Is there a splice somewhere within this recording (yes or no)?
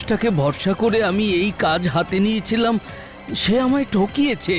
no